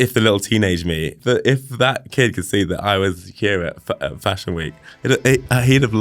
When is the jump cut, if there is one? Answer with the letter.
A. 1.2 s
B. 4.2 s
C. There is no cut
A